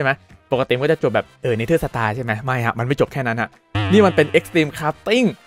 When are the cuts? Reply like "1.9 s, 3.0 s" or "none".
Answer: 1.3 s